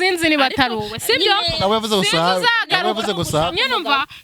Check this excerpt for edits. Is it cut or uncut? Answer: uncut